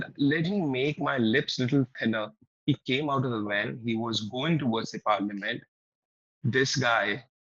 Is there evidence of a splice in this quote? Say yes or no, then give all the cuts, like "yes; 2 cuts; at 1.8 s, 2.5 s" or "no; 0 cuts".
yes; 1 cut; at 2.4 s